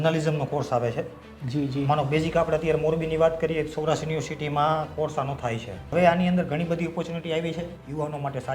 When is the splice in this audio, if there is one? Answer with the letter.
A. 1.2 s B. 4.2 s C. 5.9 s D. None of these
C